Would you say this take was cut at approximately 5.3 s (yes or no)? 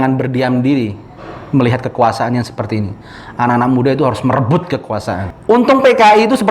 yes